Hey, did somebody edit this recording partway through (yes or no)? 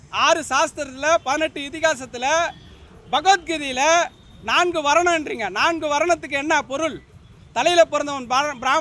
no